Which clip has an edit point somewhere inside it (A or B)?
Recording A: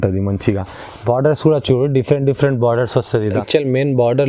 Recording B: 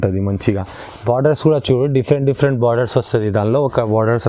A